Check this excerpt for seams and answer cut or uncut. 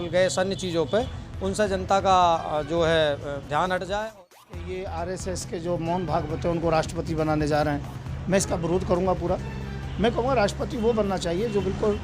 cut